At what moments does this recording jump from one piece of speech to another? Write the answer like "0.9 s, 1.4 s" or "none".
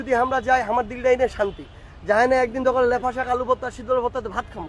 none